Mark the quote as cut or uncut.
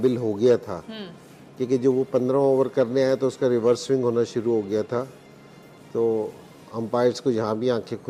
uncut